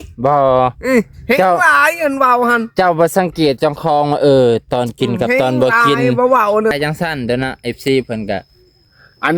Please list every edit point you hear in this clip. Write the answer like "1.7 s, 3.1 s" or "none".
6.7 s